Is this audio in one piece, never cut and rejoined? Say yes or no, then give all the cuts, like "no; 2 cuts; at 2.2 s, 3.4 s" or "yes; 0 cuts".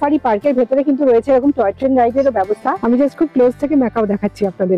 no; 1 cut; at 2.8 s